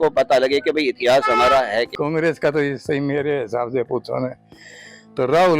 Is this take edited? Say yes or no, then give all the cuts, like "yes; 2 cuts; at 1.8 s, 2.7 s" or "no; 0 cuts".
yes; 1 cut; at 1.9 s